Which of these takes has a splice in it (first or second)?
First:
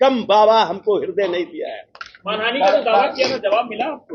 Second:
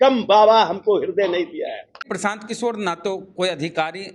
second